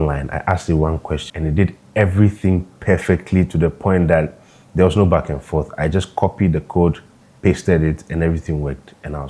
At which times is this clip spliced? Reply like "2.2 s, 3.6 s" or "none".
1.3 s